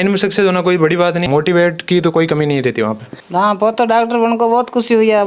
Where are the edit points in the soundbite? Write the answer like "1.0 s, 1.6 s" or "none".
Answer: 1.3 s, 3.1 s